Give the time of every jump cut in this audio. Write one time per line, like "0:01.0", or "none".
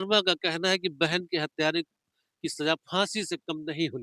none